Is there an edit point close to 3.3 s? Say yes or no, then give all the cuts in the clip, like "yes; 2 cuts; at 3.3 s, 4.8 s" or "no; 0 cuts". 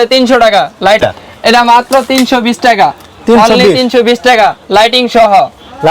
no; 1 cut; at 1.0 s